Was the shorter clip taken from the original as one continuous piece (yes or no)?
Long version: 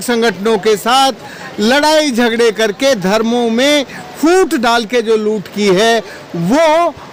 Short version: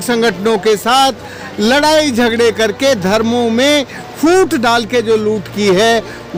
yes